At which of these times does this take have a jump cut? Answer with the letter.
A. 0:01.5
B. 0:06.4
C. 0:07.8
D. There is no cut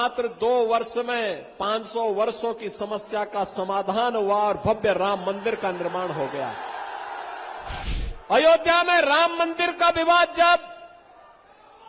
C